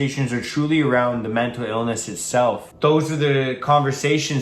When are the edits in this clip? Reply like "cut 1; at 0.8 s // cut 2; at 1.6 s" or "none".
cut 1; at 2.7 s